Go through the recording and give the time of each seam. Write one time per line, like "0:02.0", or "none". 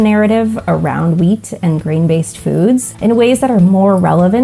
0:02.9